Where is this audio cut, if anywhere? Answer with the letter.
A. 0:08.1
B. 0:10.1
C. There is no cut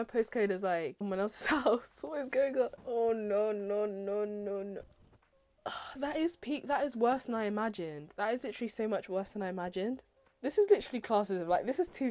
B